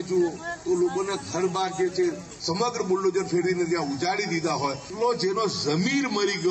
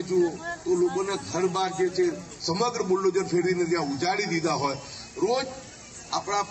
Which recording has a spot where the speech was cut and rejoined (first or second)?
first